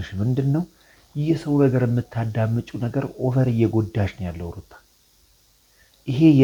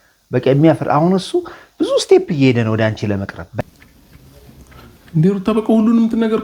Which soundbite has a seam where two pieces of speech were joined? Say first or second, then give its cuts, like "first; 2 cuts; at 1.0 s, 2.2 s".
second; 1 cut; at 3.6 s